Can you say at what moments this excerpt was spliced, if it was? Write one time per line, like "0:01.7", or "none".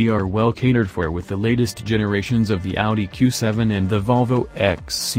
none